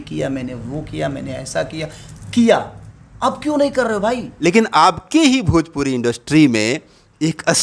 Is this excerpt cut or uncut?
cut